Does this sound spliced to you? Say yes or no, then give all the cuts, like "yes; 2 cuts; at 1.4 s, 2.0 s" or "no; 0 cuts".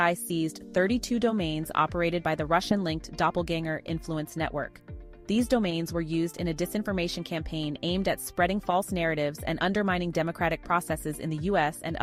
no; 0 cuts